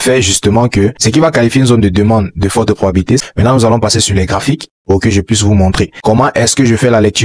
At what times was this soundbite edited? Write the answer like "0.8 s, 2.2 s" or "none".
1.0 s, 3.2 s, 6.0 s